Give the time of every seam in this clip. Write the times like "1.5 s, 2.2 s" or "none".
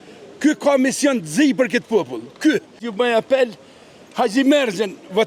2.8 s